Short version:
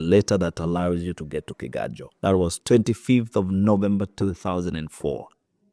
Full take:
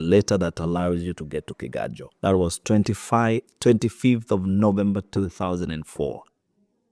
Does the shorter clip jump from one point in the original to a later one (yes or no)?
yes